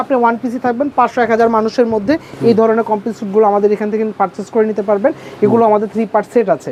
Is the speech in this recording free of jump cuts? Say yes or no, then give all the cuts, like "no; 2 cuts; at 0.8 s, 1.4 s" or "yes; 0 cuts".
yes; 0 cuts